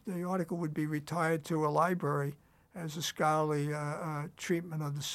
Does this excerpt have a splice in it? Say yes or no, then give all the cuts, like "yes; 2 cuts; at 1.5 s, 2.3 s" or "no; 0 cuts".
no; 0 cuts